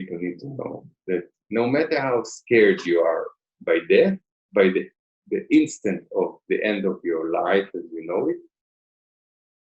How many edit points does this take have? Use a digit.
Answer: 0